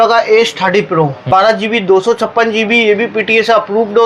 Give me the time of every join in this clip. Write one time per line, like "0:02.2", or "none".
0:01.2